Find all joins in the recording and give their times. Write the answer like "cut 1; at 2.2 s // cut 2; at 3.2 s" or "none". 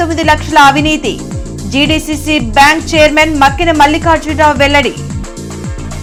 none